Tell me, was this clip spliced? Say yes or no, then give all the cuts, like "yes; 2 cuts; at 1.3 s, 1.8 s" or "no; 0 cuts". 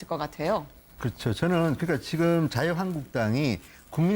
yes; 1 cut; at 3.0 s